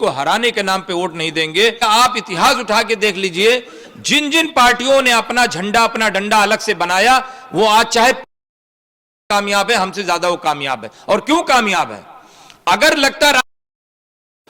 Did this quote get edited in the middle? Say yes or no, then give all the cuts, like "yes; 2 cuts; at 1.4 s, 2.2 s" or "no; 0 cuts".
yes; 1 cut; at 1.8 s